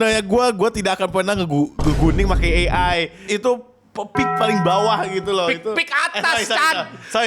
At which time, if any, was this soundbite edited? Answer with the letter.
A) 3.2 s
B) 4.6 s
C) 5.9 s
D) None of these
A